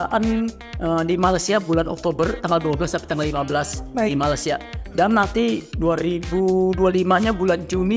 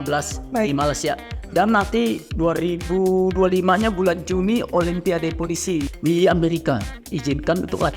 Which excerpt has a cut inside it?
second; 2 cuts; at 5.9 s, 7.0 s

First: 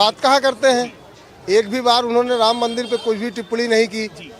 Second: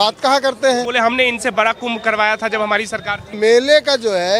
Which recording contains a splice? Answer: second; 2 cuts; at 0.9 s, 3.3 s

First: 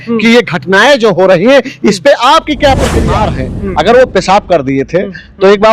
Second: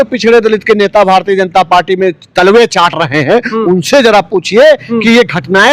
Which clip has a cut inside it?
first; 1 cut; at 3.1 s

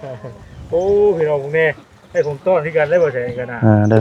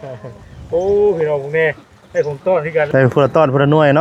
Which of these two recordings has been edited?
second; 1 cut; at 2.9 s

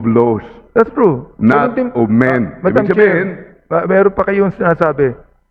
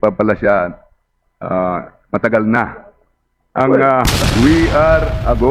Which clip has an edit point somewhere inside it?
second; 1 cut; at 4.1 s

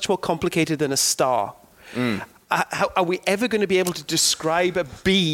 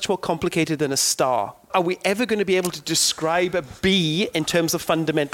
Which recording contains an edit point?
second; 1 cut; at 1.7 s

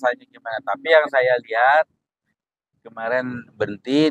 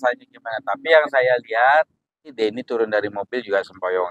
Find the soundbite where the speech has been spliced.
second; 1 cut; at 2.4 s

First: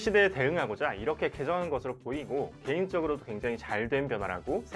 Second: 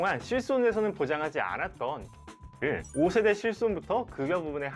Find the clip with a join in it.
second; 1 cut; at 2.5 s

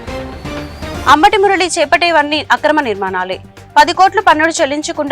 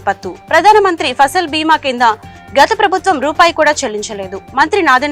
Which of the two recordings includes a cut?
first; 1 cut; at 0.9 s

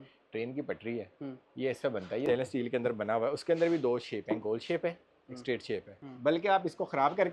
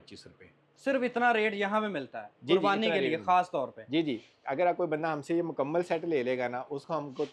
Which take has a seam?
first; 2 cuts; at 2.3 s, 6.0 s

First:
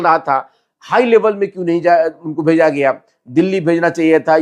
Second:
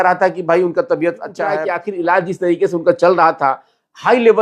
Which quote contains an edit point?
second; 1 cut; at 1.4 s

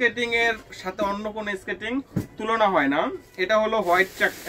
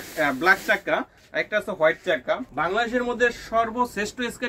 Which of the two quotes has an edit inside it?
second; 1 cut; at 2.5 s

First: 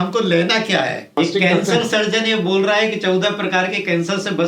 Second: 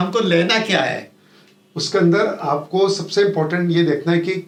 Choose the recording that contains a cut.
first; 1 cut; at 1.1 s

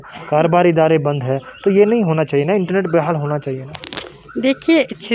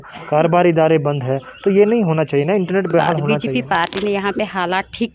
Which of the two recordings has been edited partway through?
second; 1 cut; at 3.3 s

